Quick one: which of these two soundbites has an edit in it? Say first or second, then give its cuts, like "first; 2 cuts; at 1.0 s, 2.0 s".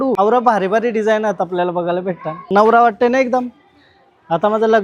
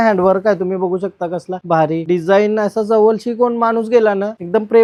first; 1 cut; at 2.3 s